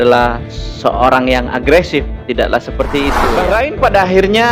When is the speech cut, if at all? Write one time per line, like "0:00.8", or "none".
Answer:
0:03.2